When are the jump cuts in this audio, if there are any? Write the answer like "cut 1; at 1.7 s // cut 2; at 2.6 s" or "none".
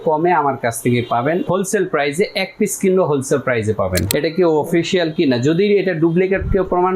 cut 1; at 1.4 s // cut 2; at 4.1 s